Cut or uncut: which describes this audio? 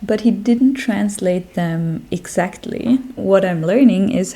cut